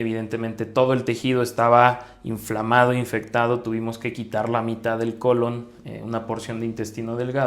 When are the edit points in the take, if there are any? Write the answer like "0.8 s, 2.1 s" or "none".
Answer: none

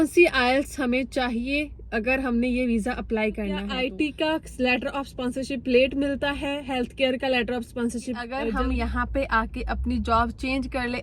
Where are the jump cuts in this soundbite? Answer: 3.8 s, 8.4 s

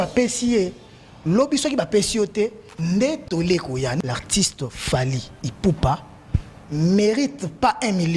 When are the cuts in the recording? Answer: 4.0 s

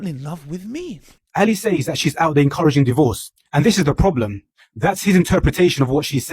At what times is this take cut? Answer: 1.1 s

